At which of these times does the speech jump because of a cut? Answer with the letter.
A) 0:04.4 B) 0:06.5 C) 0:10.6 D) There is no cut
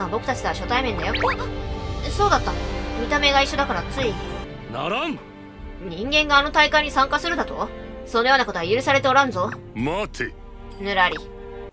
A